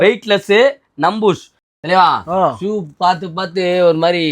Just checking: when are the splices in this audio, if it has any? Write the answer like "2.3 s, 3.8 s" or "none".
1.6 s